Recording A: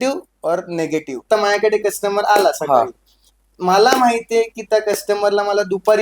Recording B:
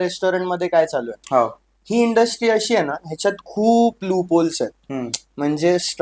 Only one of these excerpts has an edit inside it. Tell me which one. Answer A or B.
A